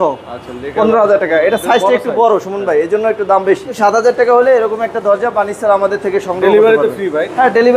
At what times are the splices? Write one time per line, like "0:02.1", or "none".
0:03.8